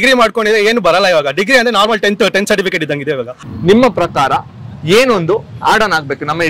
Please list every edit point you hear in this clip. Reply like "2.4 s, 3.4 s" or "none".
none